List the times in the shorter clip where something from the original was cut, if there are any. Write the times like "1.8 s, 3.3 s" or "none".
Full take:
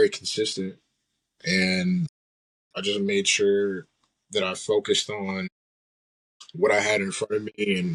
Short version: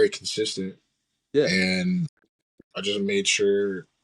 none